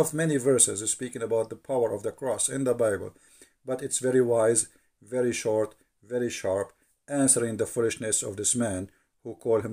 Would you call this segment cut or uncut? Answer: uncut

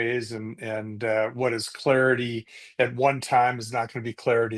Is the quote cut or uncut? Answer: uncut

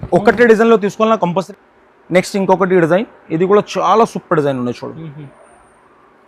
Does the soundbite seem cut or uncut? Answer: cut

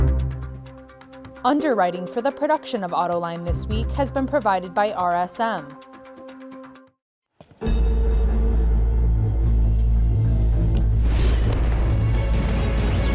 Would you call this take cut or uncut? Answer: cut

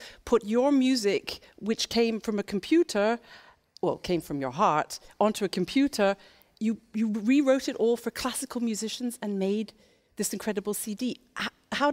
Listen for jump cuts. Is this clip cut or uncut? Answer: cut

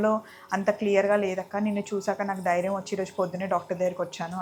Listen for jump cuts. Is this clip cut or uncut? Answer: uncut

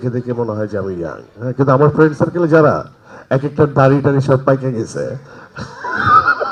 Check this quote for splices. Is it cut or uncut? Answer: uncut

